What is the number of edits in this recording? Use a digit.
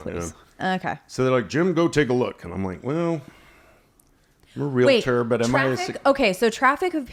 0